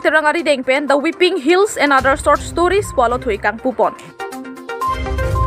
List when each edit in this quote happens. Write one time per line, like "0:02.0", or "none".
none